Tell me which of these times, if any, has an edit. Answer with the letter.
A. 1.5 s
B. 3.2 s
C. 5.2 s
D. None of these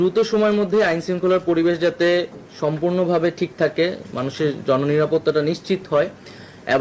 D